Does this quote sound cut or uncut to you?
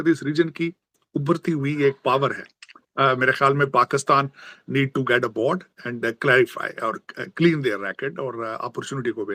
uncut